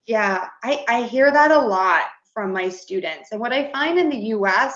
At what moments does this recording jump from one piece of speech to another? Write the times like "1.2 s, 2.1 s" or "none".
none